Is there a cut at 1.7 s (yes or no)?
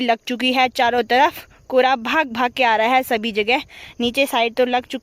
no